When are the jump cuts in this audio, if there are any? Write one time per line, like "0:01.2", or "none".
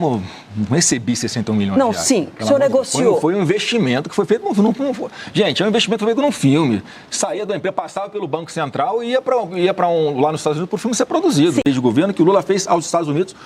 0:11.6